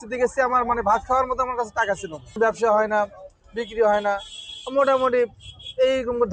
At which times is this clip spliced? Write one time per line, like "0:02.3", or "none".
none